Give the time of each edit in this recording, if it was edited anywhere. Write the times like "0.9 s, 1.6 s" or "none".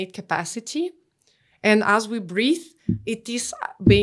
none

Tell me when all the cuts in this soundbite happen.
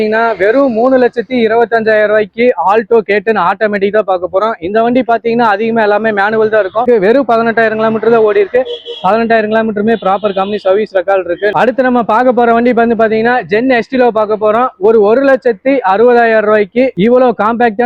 6.8 s, 11.5 s

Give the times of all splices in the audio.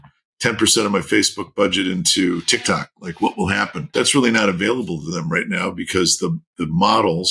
3.9 s

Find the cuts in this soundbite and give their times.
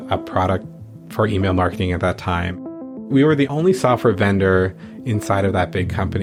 none

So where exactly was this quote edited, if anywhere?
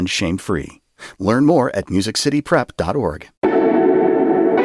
3.2 s

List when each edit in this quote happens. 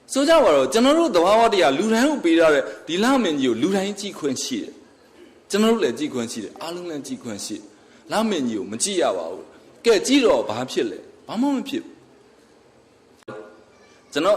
13.3 s

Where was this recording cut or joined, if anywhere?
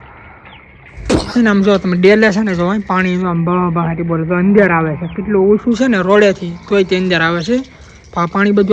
1.3 s

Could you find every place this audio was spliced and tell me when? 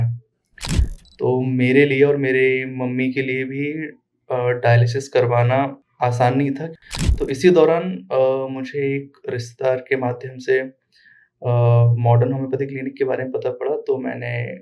6.7 s

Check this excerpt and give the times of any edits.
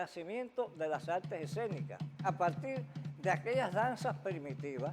2.2 s

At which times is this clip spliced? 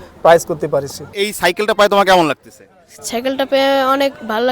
1.0 s

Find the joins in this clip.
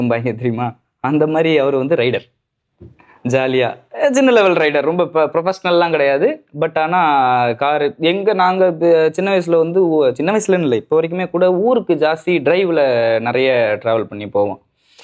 none

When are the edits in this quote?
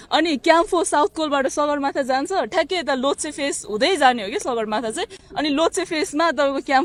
none

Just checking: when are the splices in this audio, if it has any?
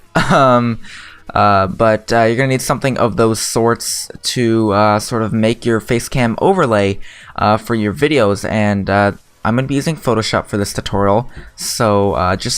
1.8 s

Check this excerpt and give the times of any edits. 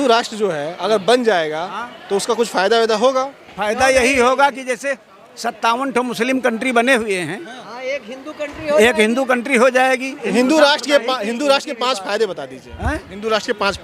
10.2 s

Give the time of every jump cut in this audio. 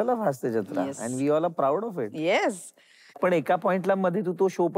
3.2 s

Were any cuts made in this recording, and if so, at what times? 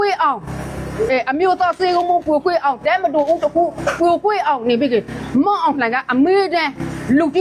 none

